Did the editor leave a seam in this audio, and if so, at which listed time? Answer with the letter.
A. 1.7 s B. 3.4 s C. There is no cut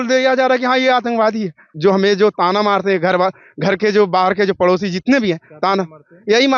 A